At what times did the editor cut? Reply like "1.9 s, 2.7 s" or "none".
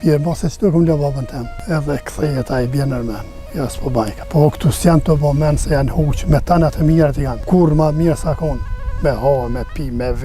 1.5 s, 4.2 s, 7.3 s